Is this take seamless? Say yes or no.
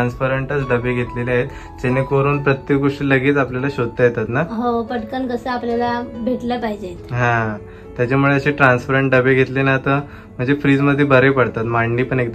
yes